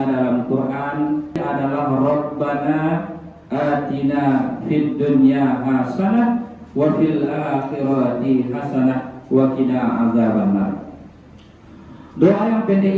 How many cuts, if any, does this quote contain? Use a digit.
1